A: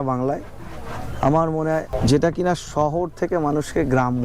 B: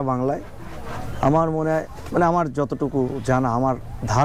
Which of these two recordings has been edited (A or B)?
A